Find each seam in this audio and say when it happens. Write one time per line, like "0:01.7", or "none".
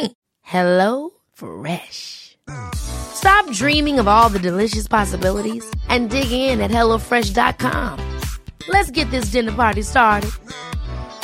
none